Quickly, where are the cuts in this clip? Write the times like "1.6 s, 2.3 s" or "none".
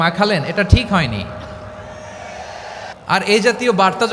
2.9 s